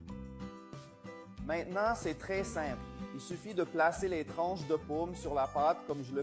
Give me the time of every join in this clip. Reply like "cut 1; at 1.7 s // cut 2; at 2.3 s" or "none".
none